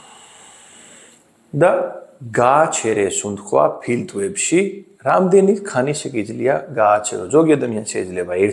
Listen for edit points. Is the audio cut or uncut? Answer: uncut